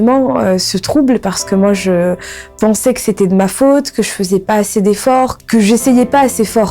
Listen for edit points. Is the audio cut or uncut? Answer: cut